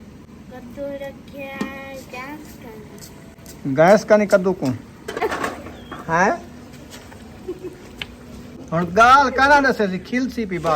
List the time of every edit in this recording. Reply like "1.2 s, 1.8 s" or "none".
5.2 s, 8.6 s